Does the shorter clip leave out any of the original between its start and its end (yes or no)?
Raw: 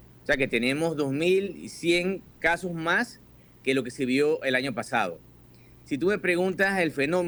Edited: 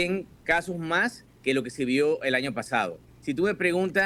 yes